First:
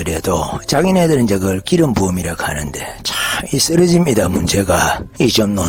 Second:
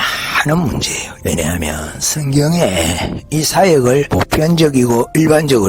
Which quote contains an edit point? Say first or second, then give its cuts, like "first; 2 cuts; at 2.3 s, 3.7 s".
second; 2 cuts; at 1.1 s, 4.1 s